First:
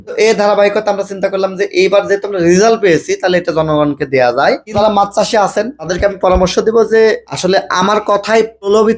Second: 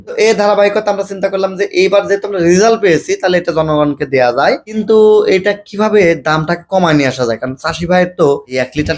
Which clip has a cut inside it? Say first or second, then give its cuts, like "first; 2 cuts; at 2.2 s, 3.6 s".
first; 1 cut; at 4.7 s